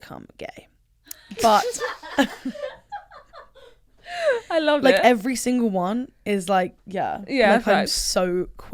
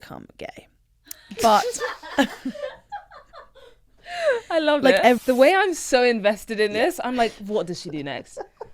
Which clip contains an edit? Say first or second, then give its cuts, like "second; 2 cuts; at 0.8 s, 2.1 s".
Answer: second; 1 cut; at 5.2 s